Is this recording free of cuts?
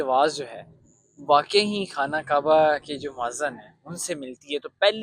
yes; 0 cuts

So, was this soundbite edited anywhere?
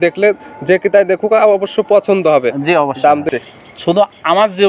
yes; 1 cut; at 3.2 s

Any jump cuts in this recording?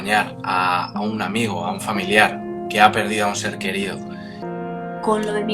yes; 1 cut; at 4.4 s

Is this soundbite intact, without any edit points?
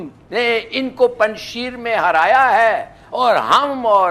yes; 0 cuts

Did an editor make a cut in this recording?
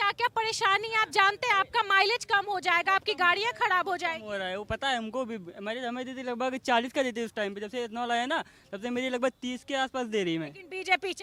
no; 0 cuts

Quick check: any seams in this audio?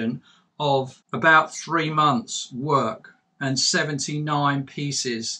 yes; 1 cut; at 1.0 s

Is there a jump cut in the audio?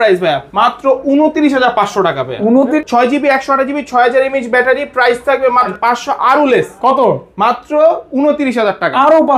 yes; 2 cuts; at 2.8 s, 5.7 s

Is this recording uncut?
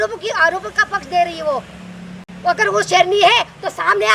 yes; 0 cuts

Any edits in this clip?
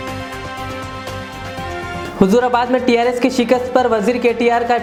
no; 0 cuts

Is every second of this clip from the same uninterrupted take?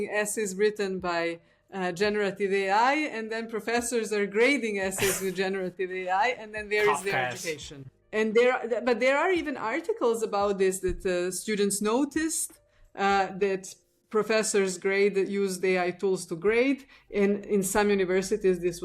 no; 1 cut; at 8.0 s

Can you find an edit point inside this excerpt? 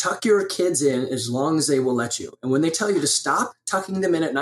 no; 0 cuts

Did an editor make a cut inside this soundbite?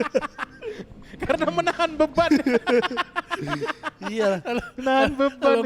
no; 0 cuts

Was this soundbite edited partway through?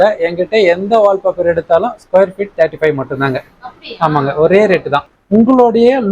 yes; 1 cut; at 5.1 s

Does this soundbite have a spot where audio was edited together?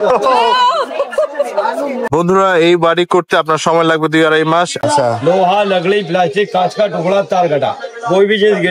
yes; 2 cuts; at 2.1 s, 4.8 s

